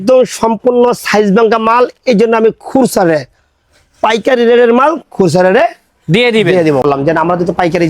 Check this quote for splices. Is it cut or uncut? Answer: cut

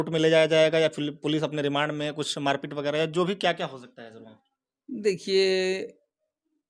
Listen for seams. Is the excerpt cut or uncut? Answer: uncut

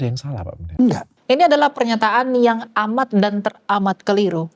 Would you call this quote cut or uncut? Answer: cut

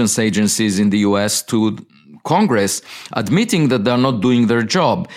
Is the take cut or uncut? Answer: uncut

